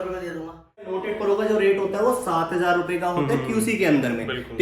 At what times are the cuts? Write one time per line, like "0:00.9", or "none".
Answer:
0:01.0